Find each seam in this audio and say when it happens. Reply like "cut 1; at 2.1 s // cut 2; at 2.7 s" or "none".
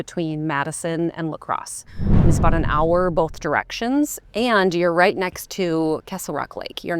cut 1; at 4.2 s